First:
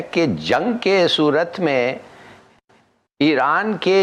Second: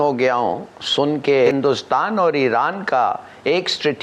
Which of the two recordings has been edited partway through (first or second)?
second